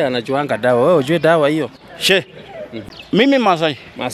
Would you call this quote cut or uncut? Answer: cut